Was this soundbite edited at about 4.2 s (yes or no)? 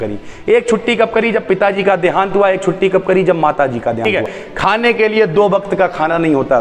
yes